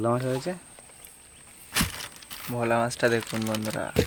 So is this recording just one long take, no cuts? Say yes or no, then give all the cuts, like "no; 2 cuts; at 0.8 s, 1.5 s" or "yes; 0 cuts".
yes; 0 cuts